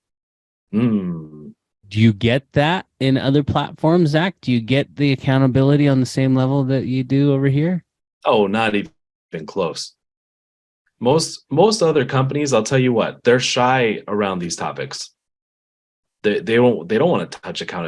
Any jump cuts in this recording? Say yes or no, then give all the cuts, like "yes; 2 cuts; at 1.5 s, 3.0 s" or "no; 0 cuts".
yes; 1 cut; at 1.9 s